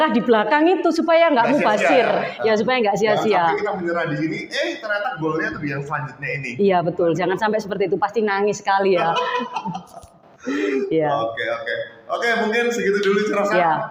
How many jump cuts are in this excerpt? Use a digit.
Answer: 0